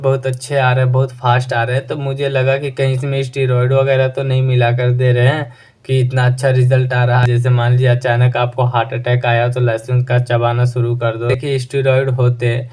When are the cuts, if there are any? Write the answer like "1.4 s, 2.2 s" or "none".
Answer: 7.2 s, 11.4 s